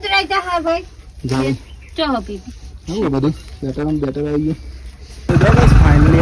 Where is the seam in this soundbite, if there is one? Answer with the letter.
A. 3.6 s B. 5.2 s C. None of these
B